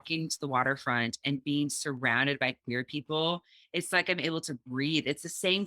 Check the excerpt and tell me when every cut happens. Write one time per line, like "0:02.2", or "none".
none